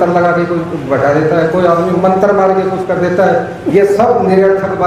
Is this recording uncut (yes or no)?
yes